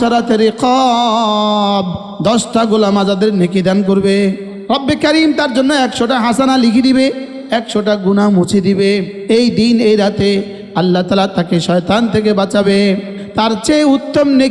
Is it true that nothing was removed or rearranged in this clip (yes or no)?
no